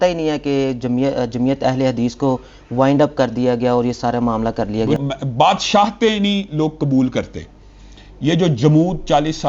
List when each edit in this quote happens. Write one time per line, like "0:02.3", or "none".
0:05.0